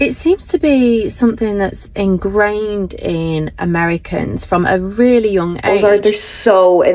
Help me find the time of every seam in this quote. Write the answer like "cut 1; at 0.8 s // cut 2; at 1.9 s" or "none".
cut 1; at 5.7 s